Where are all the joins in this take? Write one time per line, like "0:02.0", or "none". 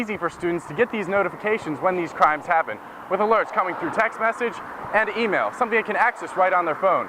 none